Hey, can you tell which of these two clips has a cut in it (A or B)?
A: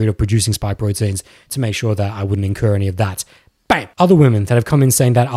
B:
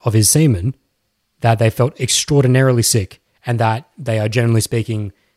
A